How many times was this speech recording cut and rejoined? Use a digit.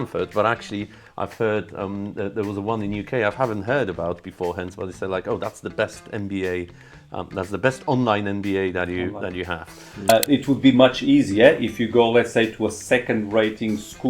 1